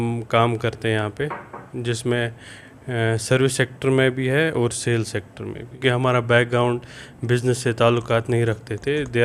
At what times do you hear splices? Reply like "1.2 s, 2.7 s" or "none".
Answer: 5.7 s